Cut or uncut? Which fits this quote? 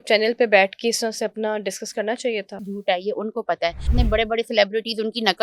cut